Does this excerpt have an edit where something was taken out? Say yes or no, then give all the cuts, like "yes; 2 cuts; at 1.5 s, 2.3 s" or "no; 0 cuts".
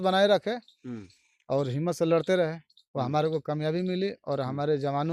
no; 0 cuts